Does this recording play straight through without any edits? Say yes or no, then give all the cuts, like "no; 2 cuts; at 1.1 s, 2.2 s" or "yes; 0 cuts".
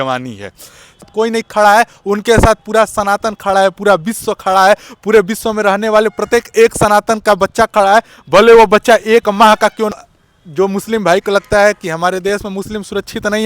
no; 2 cuts; at 1.1 s, 9.9 s